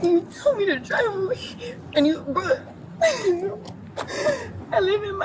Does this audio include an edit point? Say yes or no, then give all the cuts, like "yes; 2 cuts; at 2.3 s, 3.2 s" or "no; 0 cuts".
no; 0 cuts